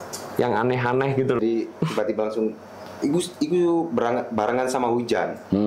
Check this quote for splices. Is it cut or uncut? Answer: cut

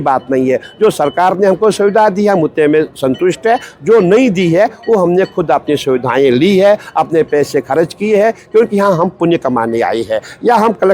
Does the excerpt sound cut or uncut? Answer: uncut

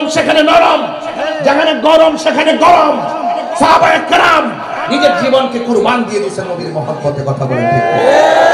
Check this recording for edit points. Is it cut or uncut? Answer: uncut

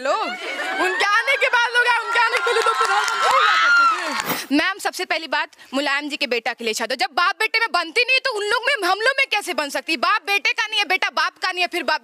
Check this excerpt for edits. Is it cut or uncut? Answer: cut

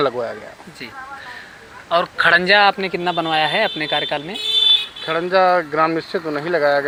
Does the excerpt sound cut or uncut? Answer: uncut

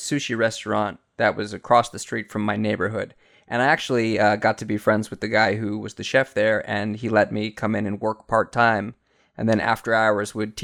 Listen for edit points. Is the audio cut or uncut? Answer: uncut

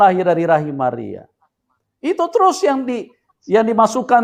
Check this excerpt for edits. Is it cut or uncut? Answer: uncut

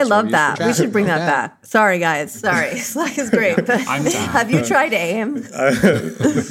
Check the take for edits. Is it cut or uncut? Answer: cut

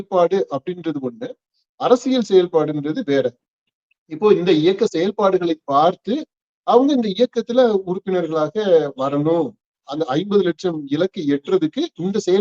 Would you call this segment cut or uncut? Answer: uncut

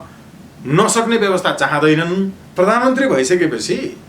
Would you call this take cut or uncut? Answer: cut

